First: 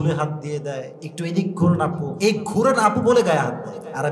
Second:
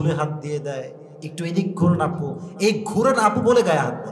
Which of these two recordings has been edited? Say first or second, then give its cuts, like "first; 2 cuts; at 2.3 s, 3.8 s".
first; 2 cuts; at 1.0 s, 2.1 s